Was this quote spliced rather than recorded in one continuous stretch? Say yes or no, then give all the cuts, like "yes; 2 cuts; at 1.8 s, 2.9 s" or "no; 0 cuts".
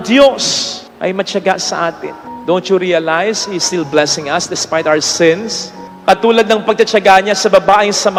no; 0 cuts